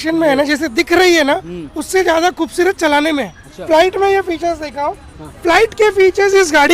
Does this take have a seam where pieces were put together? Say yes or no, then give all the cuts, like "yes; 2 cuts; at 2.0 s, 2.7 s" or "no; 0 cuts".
yes; 1 cut; at 3.6 s